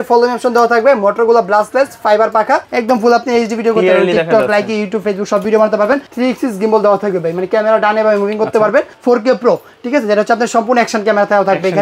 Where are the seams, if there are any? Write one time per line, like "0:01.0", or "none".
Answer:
0:02.7
0:06.1
0:08.9